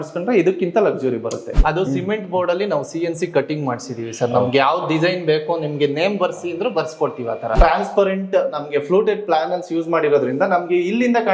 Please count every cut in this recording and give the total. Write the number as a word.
two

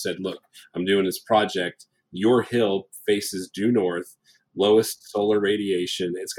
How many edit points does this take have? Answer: zero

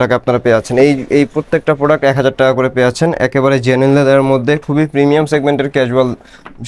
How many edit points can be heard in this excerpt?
zero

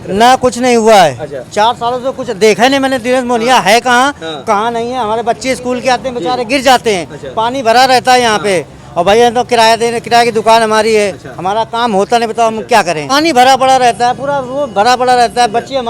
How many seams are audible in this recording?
one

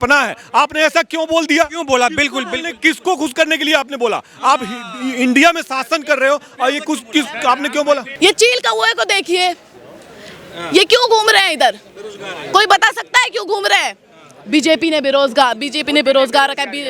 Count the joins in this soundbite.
one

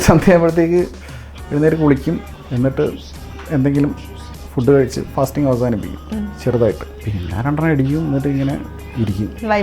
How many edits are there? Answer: two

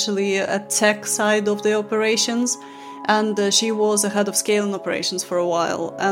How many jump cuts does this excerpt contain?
zero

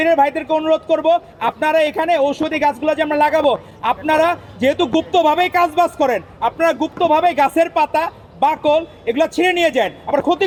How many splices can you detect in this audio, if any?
zero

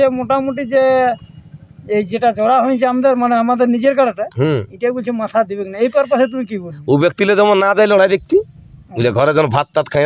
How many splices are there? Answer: zero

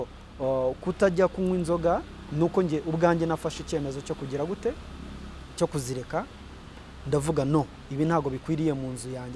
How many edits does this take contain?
zero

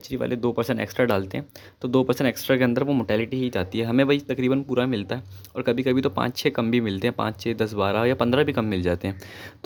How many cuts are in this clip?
zero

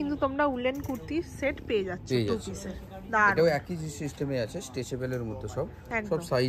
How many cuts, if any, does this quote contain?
zero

